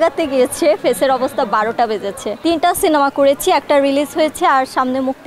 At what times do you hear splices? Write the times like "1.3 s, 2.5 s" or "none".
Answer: 2.2 s